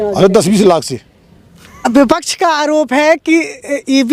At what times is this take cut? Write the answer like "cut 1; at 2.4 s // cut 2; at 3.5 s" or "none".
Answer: cut 1; at 1.9 s